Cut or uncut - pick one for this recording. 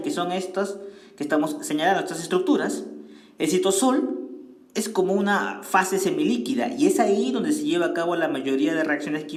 uncut